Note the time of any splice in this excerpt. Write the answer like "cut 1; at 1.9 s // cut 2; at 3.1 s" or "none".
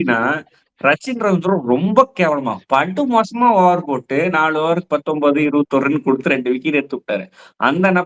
none

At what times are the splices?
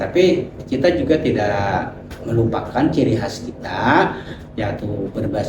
none

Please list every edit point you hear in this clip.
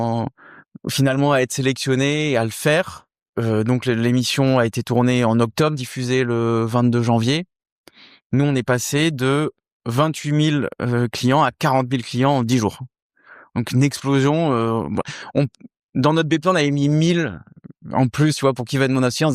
cut 1; at 3.2 s

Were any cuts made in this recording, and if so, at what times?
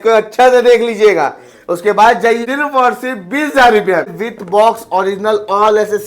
cut 1; at 2.4 s // cut 2; at 4.3 s

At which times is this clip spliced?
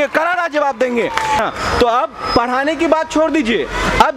cut 1; at 1.4 s

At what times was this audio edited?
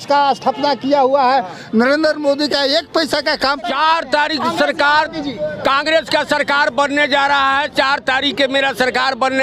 cut 1; at 3.7 s

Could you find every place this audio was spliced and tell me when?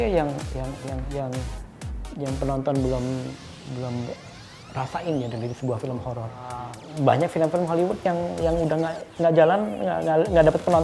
cut 1; at 6.7 s

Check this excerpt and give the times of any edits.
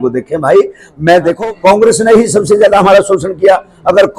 cut 1; at 1.4 s

